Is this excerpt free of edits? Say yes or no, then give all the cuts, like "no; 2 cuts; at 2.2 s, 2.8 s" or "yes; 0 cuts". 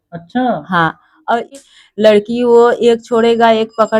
no; 1 cut; at 1.5 s